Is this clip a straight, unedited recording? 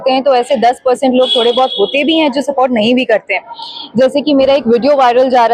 yes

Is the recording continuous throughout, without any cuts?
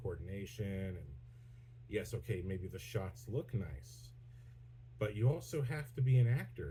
yes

